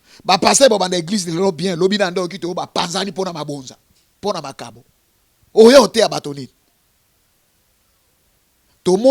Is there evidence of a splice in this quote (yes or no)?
no